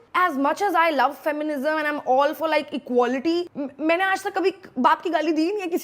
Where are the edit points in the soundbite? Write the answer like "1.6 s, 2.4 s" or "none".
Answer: 3.5 s